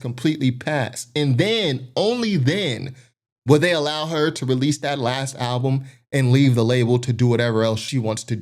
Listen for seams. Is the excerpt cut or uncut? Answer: uncut